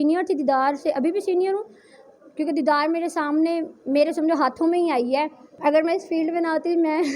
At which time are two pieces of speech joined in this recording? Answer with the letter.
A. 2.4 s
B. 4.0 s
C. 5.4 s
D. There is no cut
C